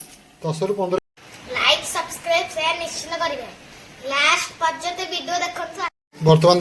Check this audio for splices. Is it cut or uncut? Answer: cut